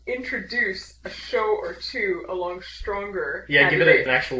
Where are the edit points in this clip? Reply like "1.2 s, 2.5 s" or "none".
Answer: 2.8 s